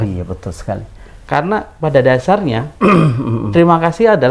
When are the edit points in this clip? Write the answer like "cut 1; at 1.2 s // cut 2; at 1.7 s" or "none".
cut 1; at 1.1 s